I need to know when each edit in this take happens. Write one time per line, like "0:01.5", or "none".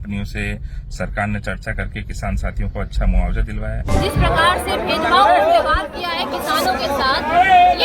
0:03.9